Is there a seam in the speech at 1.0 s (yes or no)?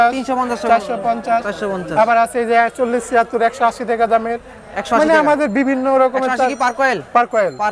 no